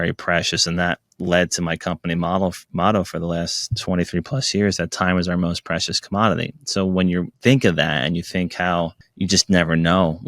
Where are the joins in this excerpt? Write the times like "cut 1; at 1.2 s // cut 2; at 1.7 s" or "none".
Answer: cut 1; at 7.3 s // cut 2; at 9.0 s